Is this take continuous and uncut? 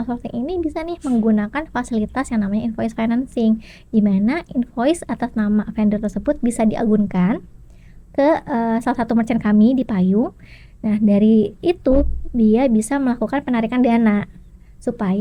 yes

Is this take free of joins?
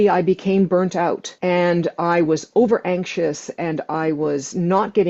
no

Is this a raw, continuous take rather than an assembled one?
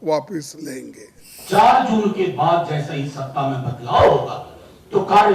no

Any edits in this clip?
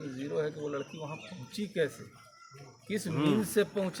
no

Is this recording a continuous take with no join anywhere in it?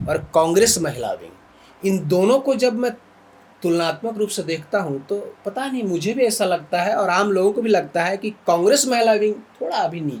yes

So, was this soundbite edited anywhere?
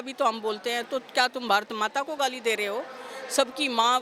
no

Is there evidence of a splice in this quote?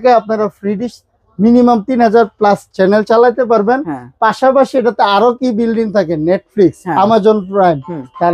no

